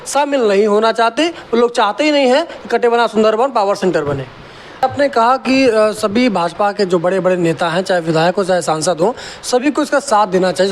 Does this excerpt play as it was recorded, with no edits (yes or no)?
no